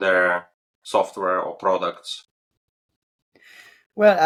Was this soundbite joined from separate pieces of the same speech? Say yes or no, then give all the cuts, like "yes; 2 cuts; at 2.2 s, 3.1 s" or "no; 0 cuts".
no; 0 cuts